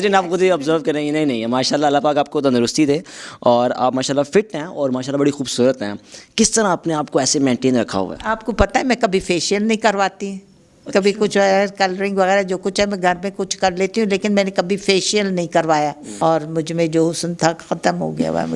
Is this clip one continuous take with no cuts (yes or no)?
no